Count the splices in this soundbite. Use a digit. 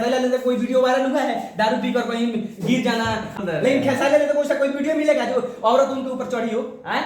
1